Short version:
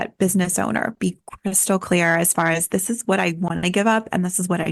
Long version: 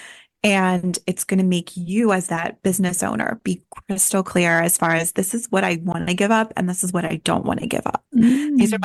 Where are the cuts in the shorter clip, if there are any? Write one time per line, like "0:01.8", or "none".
none